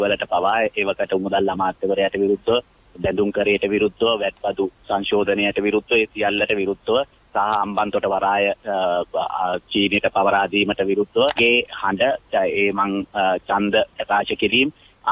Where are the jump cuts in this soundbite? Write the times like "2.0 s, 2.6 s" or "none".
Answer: 11.4 s